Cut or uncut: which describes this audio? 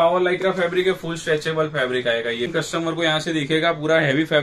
cut